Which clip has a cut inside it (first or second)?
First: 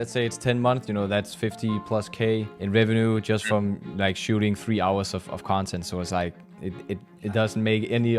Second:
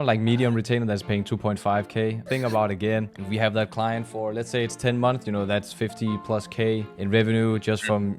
second